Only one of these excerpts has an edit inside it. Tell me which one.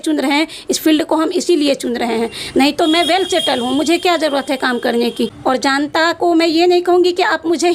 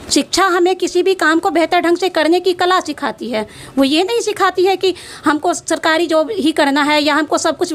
first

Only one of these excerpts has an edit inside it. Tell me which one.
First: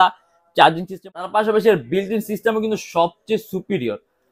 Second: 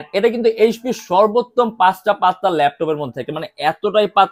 first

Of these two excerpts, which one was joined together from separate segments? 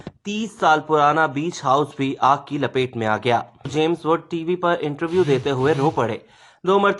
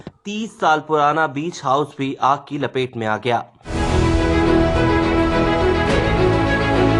first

